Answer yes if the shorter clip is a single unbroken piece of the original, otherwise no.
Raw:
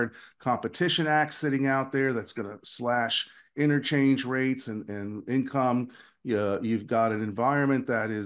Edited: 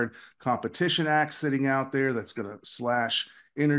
yes